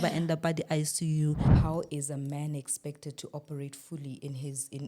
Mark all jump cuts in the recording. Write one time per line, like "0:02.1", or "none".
0:01.5